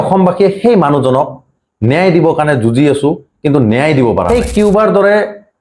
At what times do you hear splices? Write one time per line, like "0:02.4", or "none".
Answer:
0:04.3